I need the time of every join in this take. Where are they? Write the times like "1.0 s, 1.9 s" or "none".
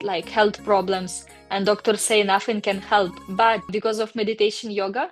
none